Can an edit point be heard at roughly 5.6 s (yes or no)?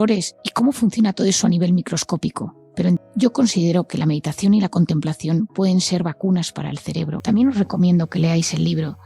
no